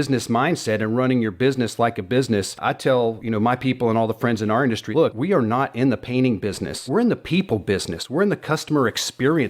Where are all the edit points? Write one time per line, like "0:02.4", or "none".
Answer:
0:02.9
0:05.0
0:06.7